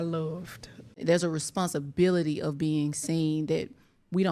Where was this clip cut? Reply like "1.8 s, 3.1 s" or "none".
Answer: 1.0 s